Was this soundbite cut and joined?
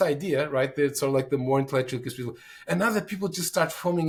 no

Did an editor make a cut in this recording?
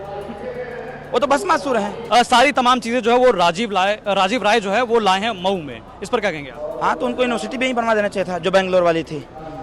yes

